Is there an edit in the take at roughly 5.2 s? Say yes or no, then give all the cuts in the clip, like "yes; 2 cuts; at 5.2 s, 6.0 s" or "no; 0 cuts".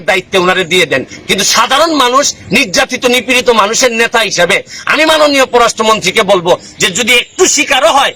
no; 0 cuts